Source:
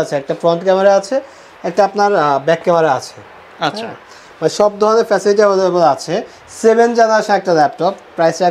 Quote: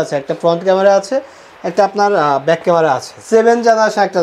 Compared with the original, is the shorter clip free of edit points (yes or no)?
no